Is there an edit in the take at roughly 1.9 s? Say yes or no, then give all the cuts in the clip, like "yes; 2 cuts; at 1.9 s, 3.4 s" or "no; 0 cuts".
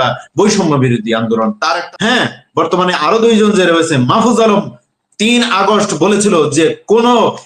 yes; 1 cut; at 1.9 s